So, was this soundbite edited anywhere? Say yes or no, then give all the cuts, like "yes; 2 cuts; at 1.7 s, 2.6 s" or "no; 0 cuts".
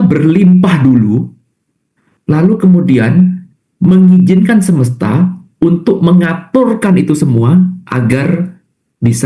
no; 0 cuts